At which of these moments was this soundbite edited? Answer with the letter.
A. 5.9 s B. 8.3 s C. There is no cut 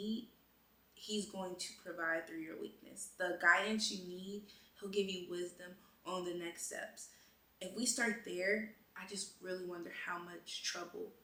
C